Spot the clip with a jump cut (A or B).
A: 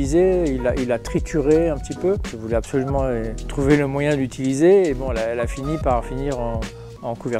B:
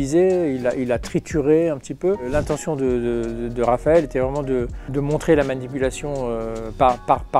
A